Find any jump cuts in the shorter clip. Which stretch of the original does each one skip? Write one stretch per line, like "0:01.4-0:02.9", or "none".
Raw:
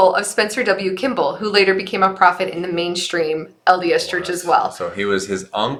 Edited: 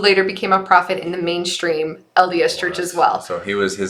none